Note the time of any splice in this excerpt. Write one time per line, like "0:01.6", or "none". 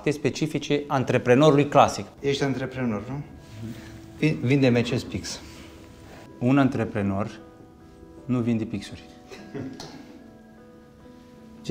0:02.1